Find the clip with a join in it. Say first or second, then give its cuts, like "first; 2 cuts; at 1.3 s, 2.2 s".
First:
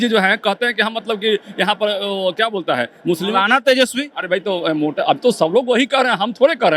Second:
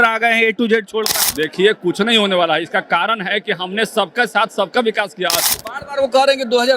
second; 2 cuts; at 1.2 s, 5.5 s